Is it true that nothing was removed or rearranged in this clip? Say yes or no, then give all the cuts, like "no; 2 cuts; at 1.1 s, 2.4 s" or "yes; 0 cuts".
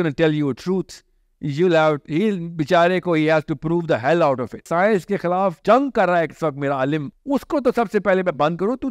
no; 3 cuts; at 4.7 s, 5.6 s, 7.1 s